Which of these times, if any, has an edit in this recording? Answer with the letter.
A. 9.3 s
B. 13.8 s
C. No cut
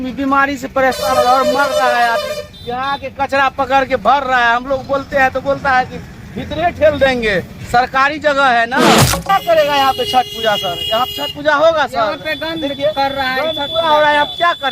A